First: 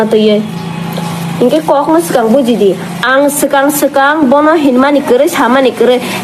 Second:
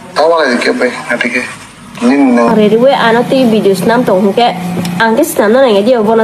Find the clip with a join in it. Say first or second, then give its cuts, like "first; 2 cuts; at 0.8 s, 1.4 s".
second; 1 cut; at 2.5 s